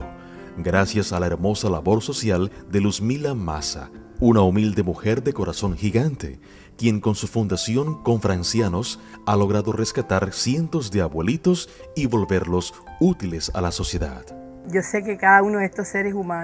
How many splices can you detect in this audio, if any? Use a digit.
1